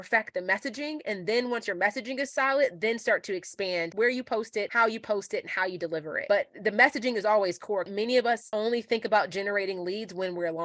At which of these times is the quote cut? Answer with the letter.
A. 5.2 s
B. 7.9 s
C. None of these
B